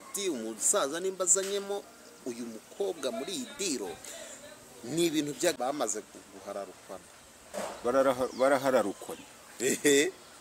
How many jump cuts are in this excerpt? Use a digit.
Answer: 1